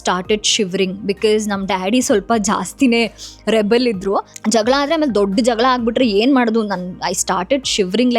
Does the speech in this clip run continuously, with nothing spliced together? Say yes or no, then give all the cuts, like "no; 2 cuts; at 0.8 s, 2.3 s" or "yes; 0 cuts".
no; 1 cut; at 4.3 s